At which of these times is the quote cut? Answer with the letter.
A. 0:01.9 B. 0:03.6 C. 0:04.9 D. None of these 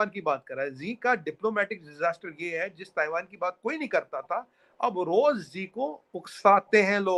D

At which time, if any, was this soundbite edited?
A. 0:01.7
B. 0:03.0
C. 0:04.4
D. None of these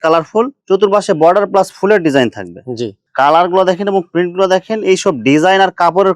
B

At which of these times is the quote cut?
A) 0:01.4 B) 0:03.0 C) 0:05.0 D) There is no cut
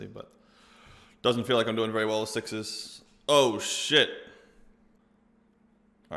C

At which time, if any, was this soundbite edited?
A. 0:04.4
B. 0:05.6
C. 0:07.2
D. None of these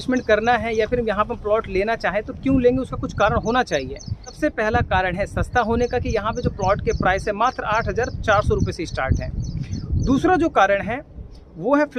A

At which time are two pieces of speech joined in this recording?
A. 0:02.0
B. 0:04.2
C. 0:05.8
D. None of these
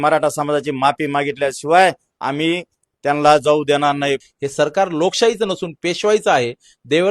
B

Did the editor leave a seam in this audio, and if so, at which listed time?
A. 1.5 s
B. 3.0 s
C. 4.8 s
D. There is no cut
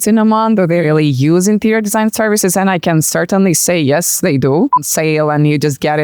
C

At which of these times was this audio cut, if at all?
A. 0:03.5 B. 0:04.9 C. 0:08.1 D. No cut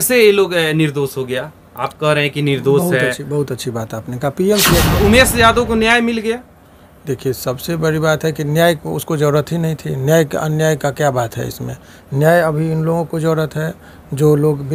B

